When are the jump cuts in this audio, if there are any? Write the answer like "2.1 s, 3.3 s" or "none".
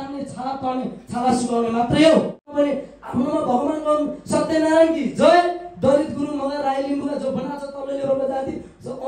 2.5 s